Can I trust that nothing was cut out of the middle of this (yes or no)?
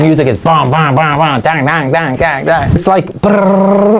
no